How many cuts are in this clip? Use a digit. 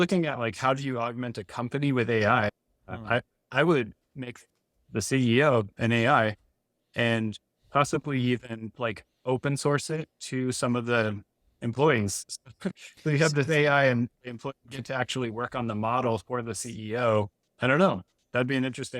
1